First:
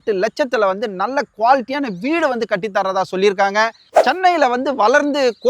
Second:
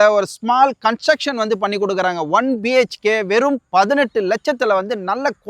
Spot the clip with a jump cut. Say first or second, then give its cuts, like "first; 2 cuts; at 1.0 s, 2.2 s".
first; 1 cut; at 3.9 s